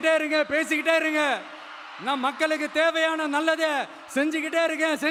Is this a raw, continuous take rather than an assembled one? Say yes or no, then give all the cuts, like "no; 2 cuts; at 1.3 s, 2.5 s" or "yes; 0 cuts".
yes; 0 cuts